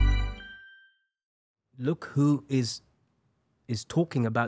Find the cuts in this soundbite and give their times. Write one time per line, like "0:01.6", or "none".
0:01.4